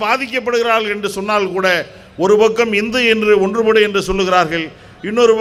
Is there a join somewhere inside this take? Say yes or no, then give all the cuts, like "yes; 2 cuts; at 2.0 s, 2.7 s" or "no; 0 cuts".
no; 0 cuts